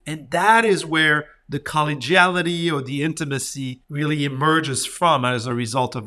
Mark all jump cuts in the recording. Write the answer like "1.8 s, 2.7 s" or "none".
3.8 s

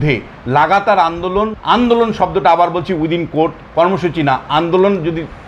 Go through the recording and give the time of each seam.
1.6 s

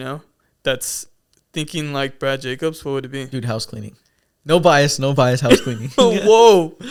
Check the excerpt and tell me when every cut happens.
none

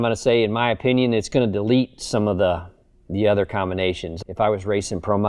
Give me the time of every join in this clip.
1.3 s, 4.1 s

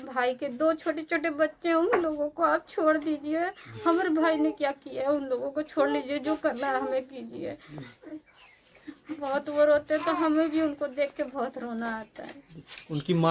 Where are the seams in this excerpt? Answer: none

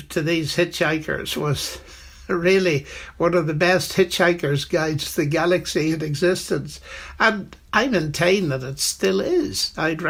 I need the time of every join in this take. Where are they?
none

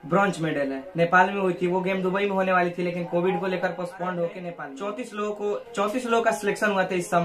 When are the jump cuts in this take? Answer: 4.6 s

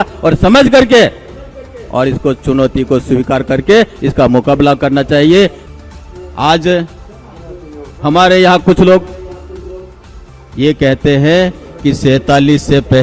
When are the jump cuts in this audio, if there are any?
5.6 s

